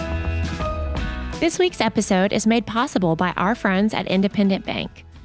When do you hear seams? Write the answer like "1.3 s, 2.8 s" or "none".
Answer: 1.3 s